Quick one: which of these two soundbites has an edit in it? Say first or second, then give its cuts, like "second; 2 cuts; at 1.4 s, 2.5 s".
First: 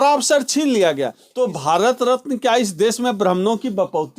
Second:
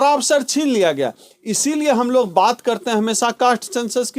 first; 1 cut; at 1.2 s